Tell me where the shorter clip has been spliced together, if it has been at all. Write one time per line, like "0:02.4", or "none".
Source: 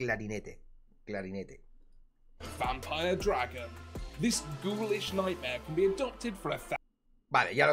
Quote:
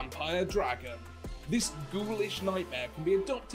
none